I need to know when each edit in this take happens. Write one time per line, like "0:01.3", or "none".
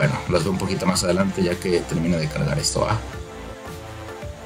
0:03.4

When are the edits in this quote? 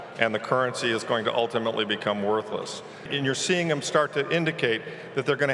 0:03.1

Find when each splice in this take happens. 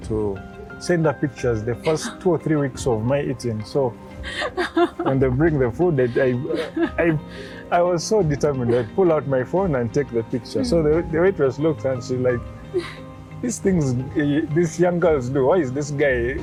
none

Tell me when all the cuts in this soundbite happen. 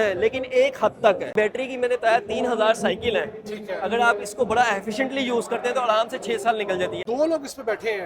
0:01.3
0:07.0

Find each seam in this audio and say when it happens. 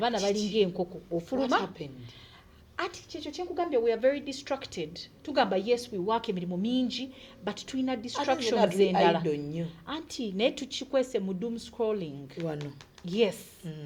none

